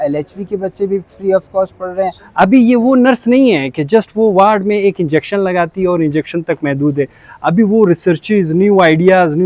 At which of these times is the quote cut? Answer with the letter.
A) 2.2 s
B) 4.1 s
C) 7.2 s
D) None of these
A